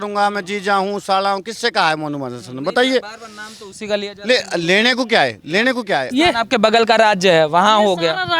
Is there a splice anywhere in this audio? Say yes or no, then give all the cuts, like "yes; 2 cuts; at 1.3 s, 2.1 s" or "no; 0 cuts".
yes; 1 cut; at 6.1 s